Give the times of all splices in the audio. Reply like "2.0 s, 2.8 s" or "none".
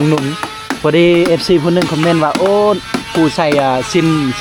none